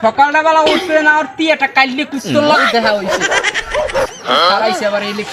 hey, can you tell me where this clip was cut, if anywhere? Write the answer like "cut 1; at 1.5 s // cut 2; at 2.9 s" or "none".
none